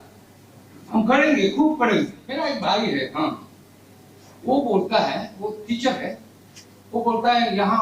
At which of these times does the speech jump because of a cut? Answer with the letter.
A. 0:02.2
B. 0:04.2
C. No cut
A